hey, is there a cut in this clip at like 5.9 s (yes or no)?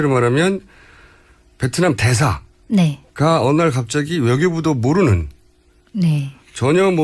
yes